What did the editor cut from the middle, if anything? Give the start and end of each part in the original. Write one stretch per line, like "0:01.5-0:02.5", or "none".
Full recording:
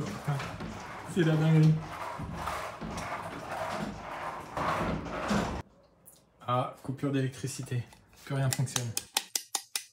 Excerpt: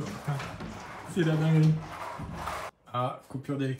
0:02.7-0:06.3